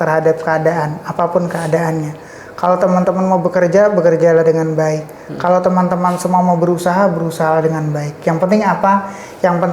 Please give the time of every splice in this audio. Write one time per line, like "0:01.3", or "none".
none